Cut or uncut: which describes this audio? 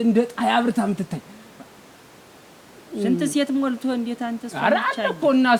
uncut